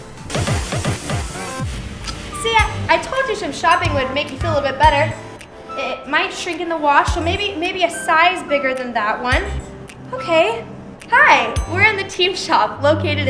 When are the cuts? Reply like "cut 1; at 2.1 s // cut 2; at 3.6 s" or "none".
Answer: cut 1; at 6.1 s